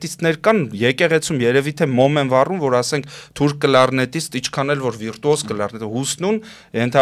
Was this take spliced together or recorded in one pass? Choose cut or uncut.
uncut